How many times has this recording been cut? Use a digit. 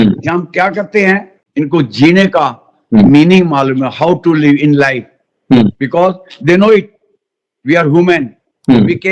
1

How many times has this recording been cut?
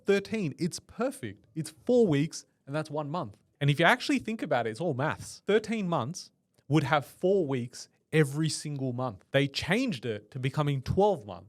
3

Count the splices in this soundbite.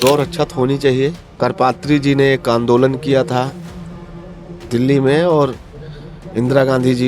1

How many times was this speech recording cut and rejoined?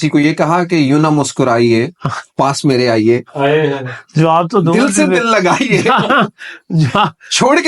0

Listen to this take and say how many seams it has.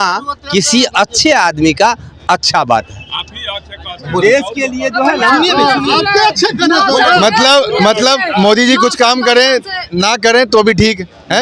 0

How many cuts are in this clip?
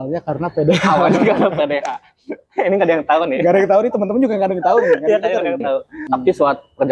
1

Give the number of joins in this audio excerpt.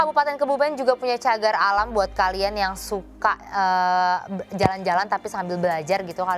0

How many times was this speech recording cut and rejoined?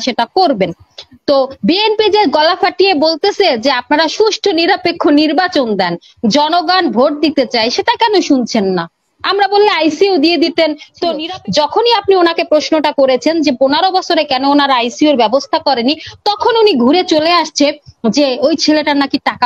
1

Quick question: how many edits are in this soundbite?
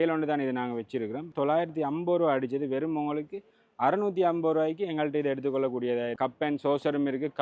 2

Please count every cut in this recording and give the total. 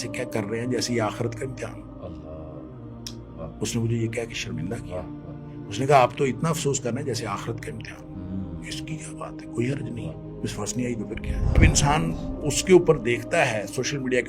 1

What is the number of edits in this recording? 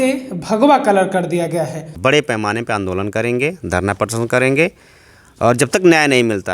1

